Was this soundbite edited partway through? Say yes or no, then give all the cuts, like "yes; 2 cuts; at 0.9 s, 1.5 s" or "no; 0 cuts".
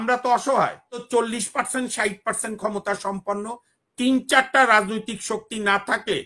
yes; 1 cut; at 1.0 s